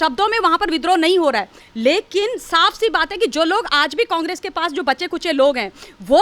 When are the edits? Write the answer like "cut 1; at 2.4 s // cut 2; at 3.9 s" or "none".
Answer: none